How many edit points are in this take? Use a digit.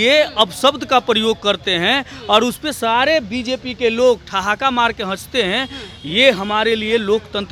0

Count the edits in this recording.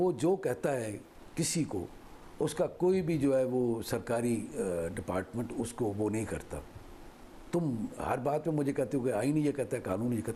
0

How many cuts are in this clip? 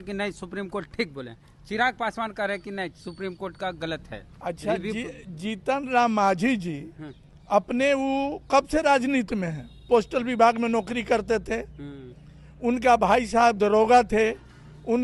0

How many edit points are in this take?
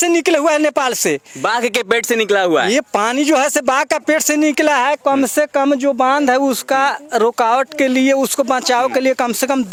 0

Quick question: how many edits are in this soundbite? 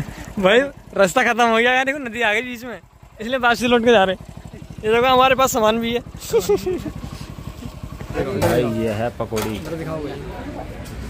1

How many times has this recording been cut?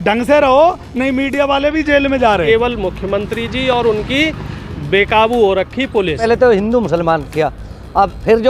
2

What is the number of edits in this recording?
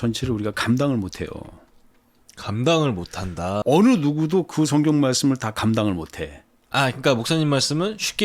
1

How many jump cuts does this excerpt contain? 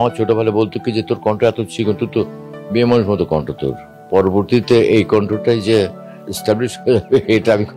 2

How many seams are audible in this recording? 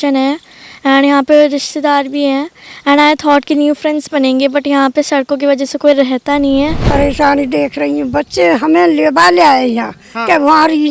1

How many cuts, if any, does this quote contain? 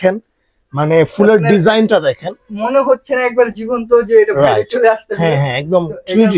0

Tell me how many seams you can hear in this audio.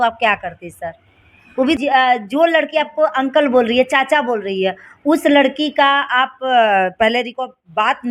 1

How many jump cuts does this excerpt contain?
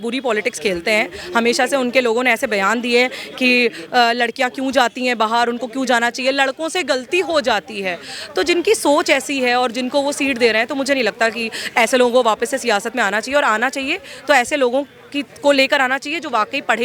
0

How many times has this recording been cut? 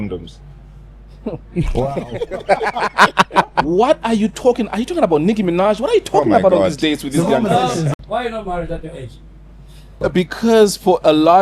3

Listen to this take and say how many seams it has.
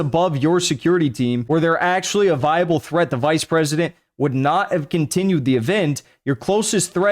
1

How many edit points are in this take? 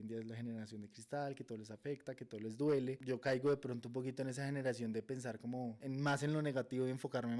2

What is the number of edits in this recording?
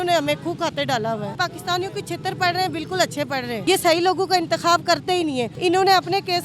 3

